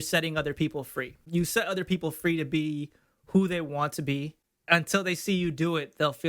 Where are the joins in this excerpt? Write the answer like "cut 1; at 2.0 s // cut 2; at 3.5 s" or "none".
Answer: cut 1; at 1.2 s // cut 2; at 4.5 s

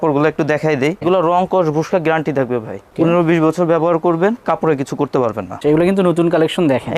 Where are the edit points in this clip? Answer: cut 1; at 1.0 s // cut 2; at 4.4 s // cut 3; at 5.5 s

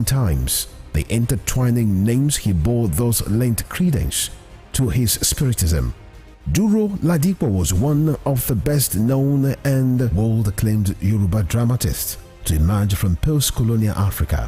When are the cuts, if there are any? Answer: none

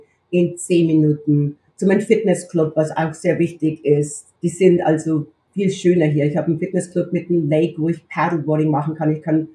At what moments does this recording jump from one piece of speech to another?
cut 1; at 1.6 s // cut 2; at 4.2 s // cut 3; at 5.4 s

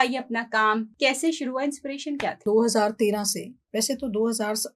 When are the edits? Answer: cut 1; at 0.9 s // cut 2; at 2.4 s

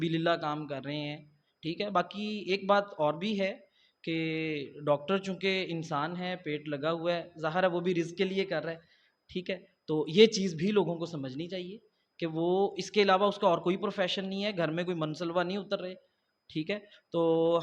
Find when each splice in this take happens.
none

